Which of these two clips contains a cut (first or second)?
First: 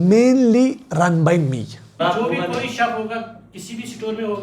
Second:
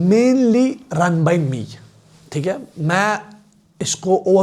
first